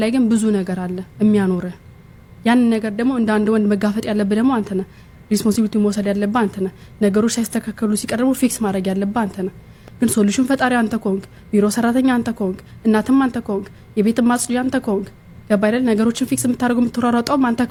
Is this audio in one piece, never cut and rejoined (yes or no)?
yes